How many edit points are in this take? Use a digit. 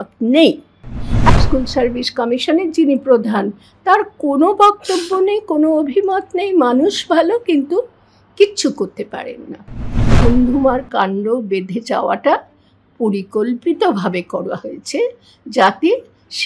2